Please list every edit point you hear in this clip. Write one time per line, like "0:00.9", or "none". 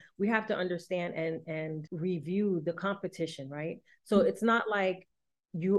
0:01.9